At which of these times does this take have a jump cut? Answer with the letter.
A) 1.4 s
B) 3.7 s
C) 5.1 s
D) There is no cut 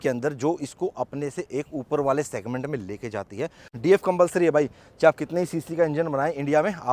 B